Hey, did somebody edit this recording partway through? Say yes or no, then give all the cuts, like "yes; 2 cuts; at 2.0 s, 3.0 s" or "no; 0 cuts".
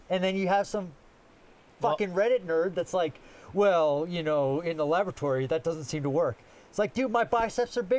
no; 0 cuts